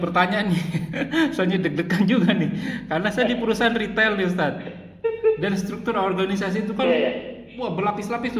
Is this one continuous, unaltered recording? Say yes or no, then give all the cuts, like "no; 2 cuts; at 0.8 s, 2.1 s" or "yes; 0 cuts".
yes; 0 cuts